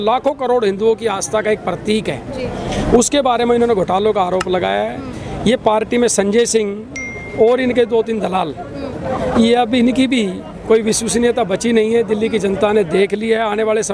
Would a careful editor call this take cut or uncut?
uncut